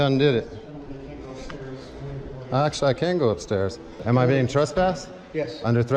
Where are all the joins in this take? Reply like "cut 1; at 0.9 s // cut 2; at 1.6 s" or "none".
cut 1; at 3.9 s